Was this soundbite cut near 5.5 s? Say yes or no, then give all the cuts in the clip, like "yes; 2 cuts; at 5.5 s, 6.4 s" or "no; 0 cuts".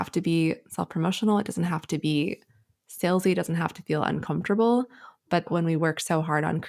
yes; 1 cut; at 5.5 s